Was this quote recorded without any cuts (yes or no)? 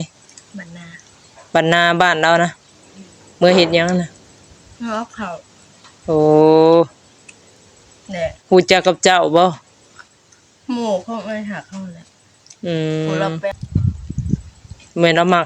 no